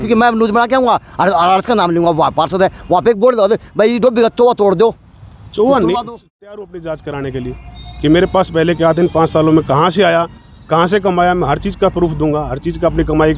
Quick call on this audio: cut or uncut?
cut